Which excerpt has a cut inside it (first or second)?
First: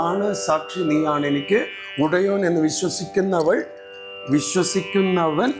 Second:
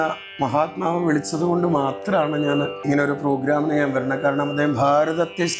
second